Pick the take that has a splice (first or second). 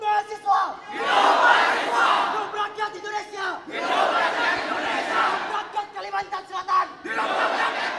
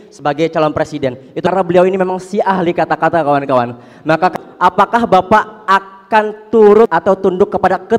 second